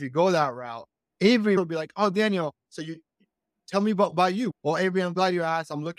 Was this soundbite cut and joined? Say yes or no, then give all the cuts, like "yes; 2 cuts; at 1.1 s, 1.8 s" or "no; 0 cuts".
yes; 2 cuts; at 1.6 s, 4.5 s